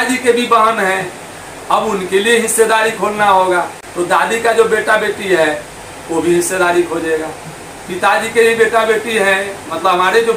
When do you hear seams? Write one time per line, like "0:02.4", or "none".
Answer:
0:03.8

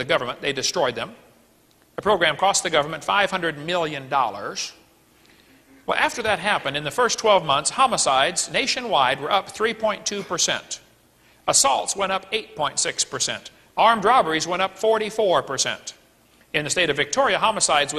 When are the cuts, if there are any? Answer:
0:08.7

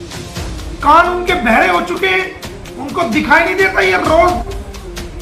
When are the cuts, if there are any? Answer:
none

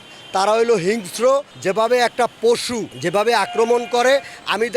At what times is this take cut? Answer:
0:01.5
0:02.9

